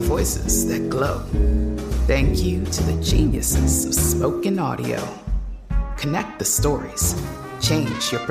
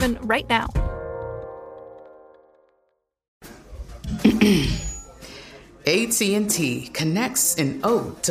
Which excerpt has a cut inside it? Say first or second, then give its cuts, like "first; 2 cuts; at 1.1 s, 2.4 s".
second; 1 cut; at 3.3 s